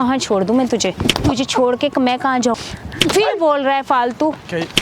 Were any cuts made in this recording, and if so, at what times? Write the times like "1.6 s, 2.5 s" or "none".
2.6 s